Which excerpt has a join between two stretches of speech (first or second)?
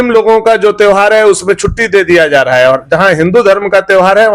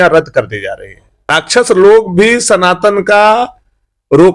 second